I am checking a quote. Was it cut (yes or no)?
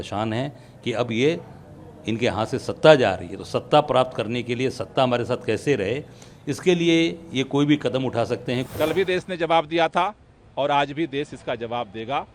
yes